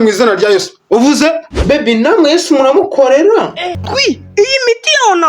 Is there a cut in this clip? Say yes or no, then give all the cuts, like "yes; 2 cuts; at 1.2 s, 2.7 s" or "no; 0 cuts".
yes; 1 cut; at 3.6 s